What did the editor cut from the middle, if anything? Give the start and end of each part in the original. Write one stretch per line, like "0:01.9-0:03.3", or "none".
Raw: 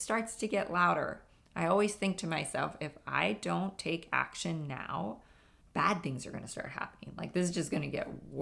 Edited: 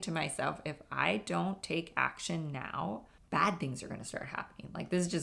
0:05.3-0:05.6